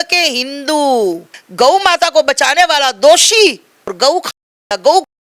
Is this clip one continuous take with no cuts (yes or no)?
no